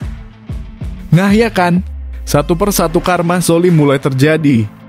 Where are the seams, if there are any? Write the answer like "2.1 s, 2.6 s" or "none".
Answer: 1.1 s

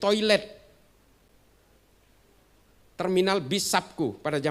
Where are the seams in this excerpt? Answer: none

